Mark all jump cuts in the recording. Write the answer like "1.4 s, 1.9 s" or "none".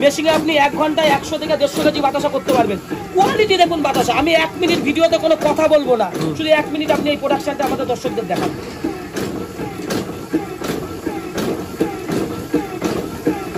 none